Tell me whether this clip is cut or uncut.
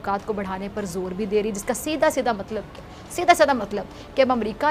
uncut